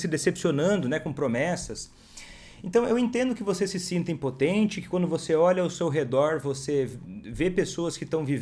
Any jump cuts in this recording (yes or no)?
no